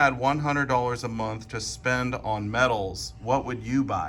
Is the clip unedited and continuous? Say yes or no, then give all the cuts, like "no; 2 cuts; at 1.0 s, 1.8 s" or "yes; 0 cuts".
yes; 0 cuts